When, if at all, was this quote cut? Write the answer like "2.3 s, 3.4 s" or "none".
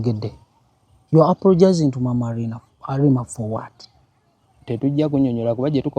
none

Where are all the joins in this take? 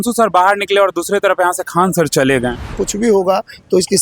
2.8 s

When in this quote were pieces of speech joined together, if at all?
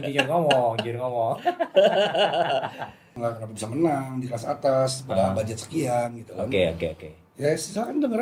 3.1 s

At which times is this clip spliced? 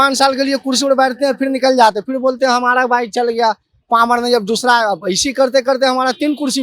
none

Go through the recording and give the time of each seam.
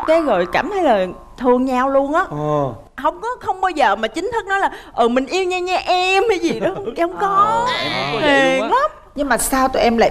none

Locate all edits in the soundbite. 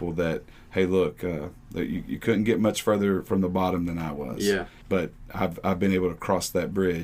none

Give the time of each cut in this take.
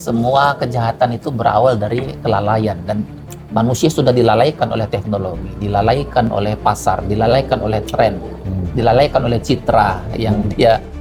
none

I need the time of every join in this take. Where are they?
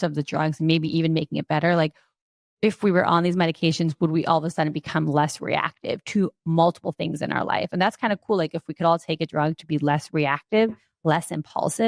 none

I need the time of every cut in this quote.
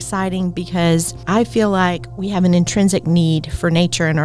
1.1 s

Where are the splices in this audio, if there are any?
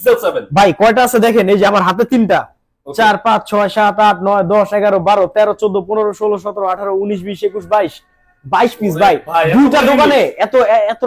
none

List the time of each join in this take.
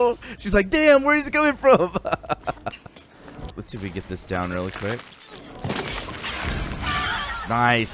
3.5 s

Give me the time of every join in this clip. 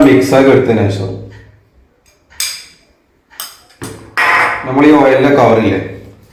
none

